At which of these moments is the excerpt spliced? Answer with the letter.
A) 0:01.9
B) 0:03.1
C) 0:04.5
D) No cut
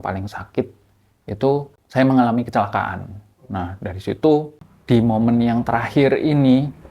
C